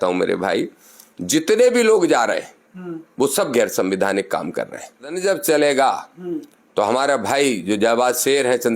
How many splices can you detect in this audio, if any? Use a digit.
1